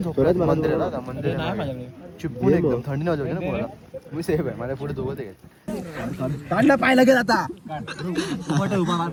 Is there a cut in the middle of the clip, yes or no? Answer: no